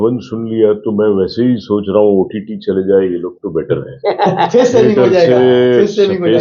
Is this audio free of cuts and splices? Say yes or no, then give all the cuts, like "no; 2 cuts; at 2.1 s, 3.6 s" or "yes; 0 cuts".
yes; 0 cuts